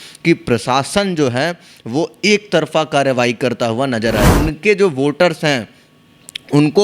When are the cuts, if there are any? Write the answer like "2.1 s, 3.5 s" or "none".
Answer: 4.3 s